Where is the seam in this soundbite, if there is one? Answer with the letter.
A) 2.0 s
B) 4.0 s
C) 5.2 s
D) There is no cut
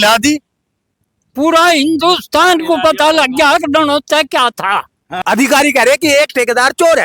C